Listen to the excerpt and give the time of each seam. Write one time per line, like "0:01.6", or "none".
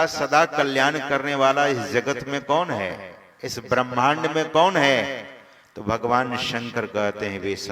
none